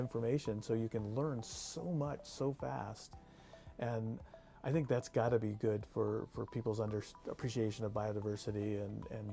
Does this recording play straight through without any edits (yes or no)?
yes